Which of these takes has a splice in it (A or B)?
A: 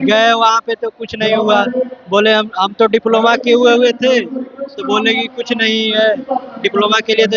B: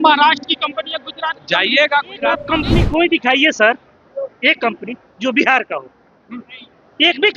B